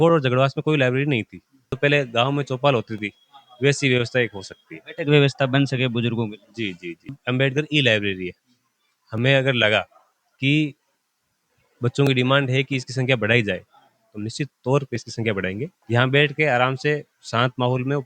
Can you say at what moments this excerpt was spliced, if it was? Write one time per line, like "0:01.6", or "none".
0:01.8
0:07.2
0:15.7